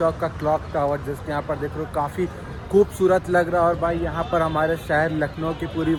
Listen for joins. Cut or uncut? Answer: uncut